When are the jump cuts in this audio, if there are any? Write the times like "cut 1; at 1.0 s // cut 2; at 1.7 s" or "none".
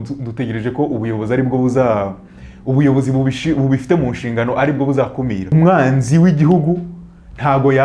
cut 1; at 5.5 s